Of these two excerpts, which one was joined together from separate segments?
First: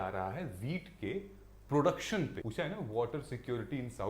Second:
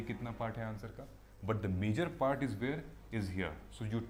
first; 1 cut; at 2.4 s

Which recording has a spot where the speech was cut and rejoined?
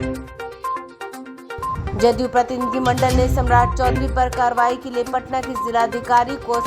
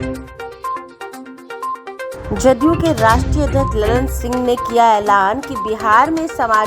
second; 1 cut; at 1.8 s

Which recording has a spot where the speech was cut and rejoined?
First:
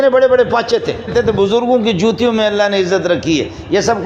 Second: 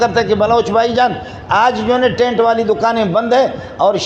first; 1 cut; at 1.1 s

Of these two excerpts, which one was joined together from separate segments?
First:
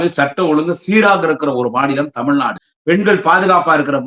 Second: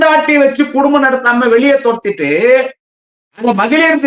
first; 1 cut; at 2.6 s

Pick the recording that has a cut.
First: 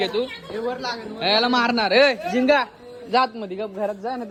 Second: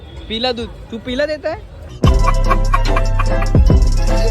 second; 1 cut; at 1.8 s

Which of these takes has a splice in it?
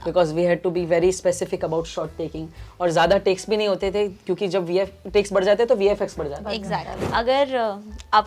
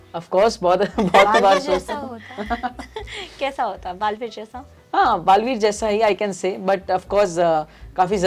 first; 1 cut; at 7.0 s

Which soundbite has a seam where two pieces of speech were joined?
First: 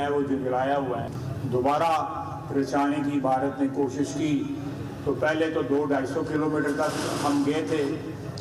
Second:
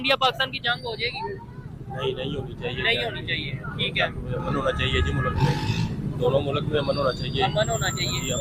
first; 1 cut; at 1.2 s

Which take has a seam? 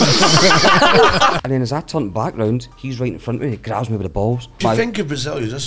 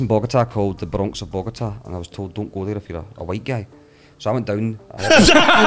first; 3 cuts; at 1.3 s, 2.8 s, 4.6 s

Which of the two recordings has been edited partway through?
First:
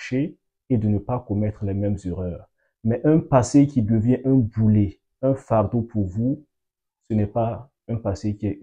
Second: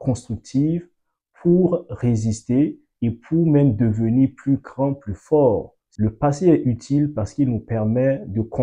second; 1 cut; at 5.8 s

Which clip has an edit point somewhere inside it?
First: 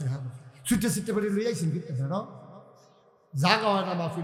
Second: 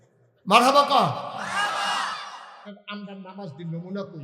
second; 1 cut; at 2.8 s

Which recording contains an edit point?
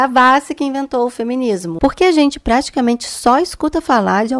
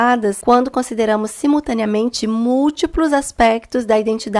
first; 1 cut; at 1.7 s

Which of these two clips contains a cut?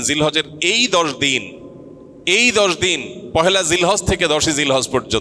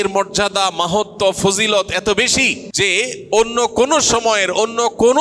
second; 1 cut; at 2.6 s

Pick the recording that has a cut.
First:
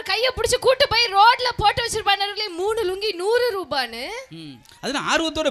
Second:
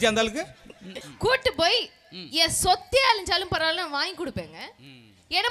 second; 1 cut; at 1.0 s

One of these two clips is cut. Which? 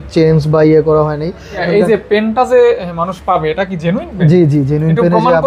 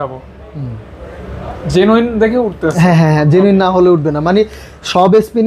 first; 1 cut; at 1.6 s

